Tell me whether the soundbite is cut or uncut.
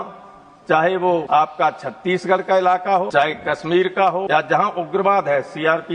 cut